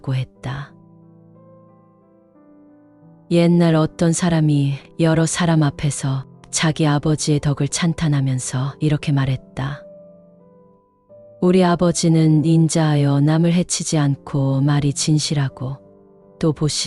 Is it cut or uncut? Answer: uncut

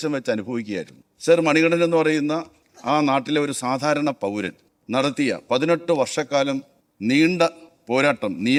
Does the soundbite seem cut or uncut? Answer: uncut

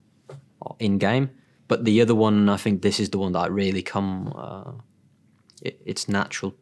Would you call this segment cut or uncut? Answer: cut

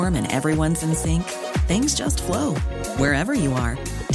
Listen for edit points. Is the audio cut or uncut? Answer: uncut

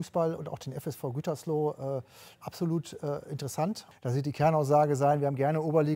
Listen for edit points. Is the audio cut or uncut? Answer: cut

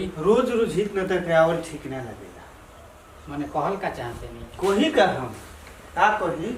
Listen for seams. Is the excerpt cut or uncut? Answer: uncut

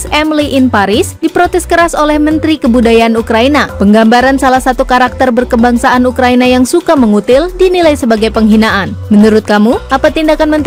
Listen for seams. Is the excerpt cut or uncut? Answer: uncut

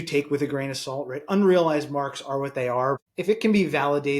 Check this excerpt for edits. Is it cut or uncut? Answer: cut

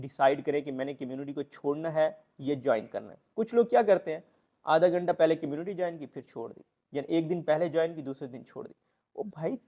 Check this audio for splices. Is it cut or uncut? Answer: uncut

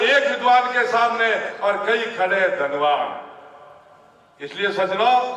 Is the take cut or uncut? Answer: uncut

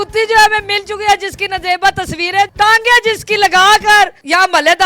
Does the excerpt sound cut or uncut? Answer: cut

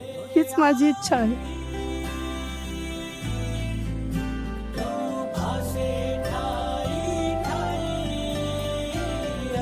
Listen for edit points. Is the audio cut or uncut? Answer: cut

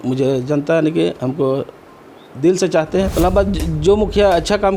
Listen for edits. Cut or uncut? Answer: cut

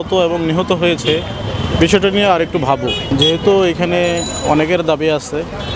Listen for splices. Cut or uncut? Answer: uncut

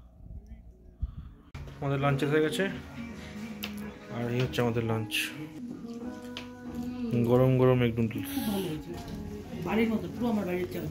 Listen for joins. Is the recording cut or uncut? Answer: cut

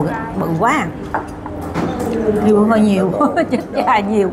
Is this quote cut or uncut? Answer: uncut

